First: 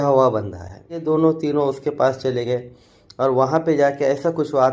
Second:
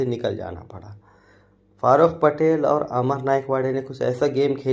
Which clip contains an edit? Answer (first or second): first